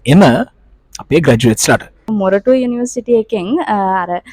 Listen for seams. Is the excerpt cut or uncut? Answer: cut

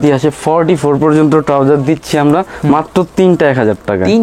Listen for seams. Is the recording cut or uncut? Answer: uncut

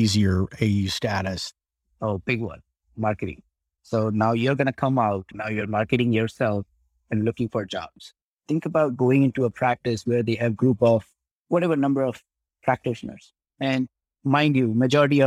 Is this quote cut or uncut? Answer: cut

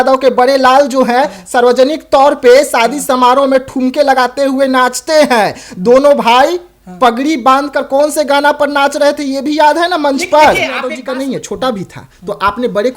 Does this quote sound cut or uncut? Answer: cut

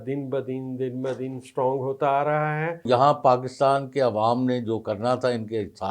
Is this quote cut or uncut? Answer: cut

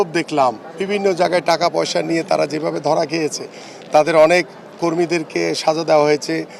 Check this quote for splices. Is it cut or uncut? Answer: uncut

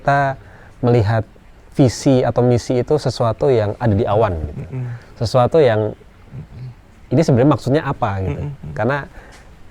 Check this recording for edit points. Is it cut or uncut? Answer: uncut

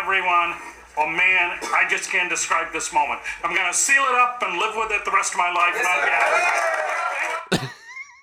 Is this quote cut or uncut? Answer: uncut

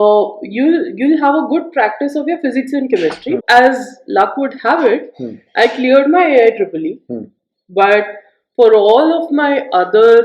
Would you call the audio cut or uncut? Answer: cut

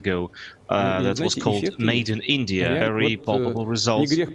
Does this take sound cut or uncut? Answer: cut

